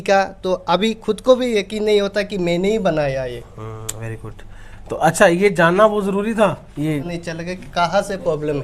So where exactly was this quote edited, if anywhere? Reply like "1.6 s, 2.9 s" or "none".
7.2 s